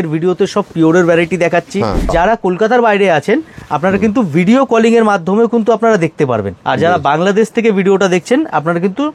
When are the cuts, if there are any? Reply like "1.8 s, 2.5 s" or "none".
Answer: 2.1 s, 6.5 s